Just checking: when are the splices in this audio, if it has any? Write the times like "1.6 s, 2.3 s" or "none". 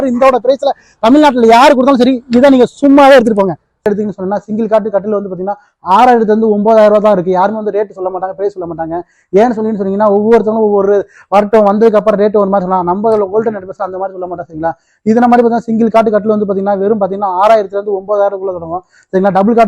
3.9 s